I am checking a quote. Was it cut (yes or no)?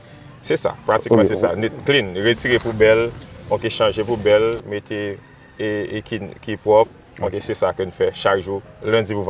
no